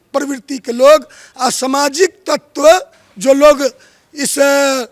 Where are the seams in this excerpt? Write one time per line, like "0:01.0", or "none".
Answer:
none